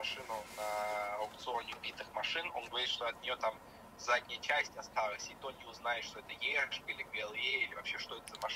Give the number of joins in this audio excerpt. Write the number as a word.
zero